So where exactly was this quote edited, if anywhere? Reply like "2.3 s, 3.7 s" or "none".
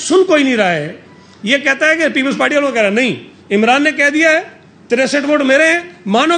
none